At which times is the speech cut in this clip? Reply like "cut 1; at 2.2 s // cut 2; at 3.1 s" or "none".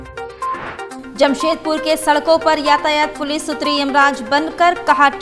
cut 1; at 1.0 s